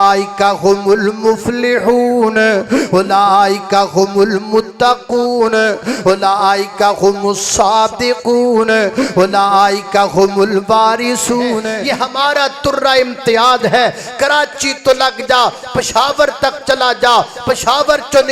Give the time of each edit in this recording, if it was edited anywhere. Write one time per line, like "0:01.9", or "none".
0:11.7